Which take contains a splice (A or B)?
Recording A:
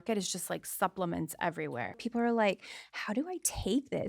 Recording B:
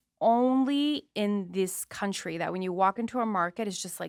A